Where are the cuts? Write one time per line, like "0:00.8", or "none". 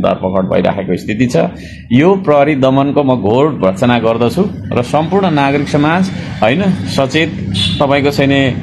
none